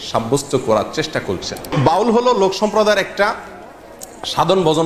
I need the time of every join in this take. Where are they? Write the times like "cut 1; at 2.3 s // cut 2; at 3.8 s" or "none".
cut 1; at 1.7 s